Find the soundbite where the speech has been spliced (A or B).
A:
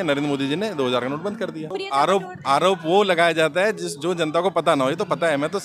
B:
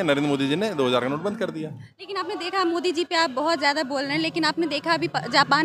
A